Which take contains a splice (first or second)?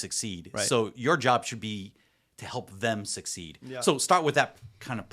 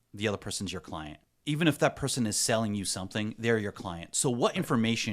second